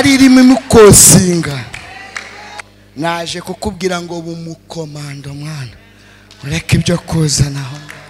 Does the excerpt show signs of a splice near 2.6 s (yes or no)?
yes